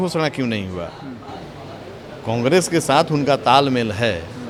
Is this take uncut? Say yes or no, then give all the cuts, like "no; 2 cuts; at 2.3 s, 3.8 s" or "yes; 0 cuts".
yes; 0 cuts